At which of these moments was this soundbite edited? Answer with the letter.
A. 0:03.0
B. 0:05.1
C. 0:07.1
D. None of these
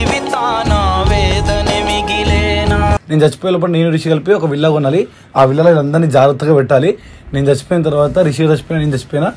A